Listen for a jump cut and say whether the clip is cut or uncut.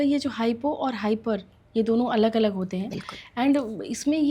uncut